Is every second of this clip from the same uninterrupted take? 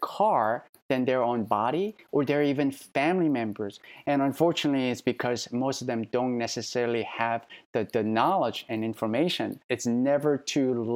no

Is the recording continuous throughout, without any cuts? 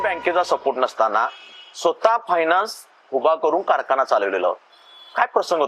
yes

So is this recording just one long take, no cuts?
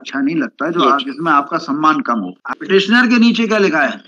no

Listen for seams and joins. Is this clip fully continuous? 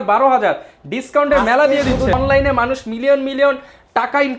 no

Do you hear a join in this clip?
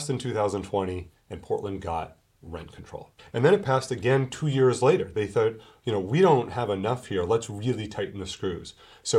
yes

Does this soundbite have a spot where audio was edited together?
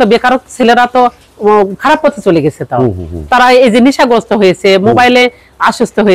no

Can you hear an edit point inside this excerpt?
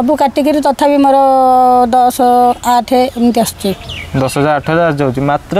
no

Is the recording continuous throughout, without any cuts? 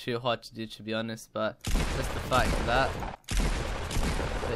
no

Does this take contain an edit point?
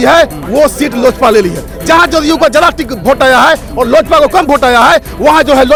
no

